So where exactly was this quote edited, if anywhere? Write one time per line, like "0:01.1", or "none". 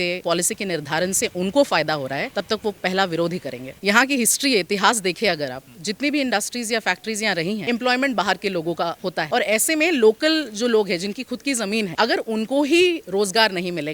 0:03.8
0:07.6
0:11.9